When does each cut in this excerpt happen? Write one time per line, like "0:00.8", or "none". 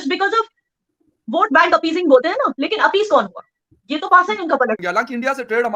none